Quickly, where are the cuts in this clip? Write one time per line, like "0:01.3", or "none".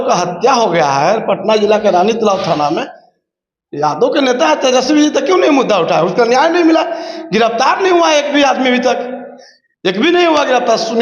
none